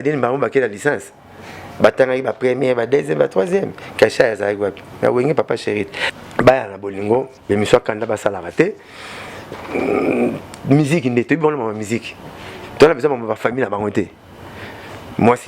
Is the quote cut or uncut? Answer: cut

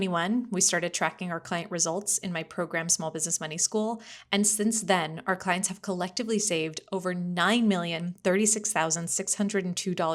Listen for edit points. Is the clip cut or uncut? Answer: uncut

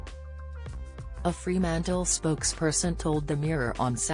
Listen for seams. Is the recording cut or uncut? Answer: cut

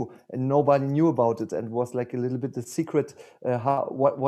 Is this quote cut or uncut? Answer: uncut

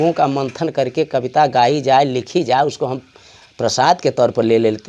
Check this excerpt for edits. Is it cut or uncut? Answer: uncut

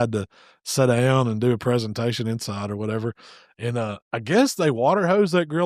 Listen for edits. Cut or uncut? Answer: uncut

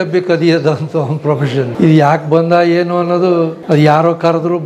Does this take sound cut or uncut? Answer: cut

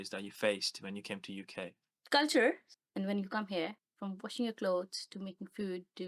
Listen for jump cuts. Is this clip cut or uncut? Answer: cut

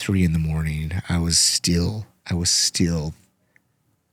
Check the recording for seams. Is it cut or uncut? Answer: uncut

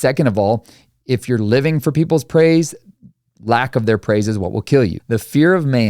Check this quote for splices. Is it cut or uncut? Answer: cut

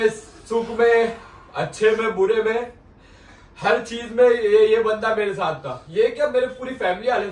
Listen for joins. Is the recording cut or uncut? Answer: uncut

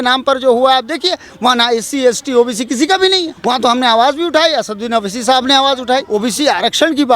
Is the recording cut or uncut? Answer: cut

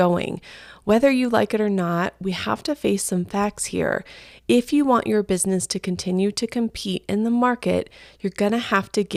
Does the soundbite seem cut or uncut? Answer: uncut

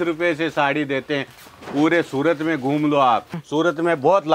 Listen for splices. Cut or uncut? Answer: cut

